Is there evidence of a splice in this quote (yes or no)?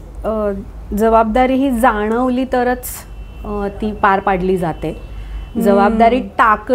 no